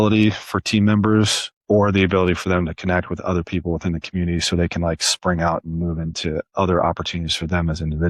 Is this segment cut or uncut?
uncut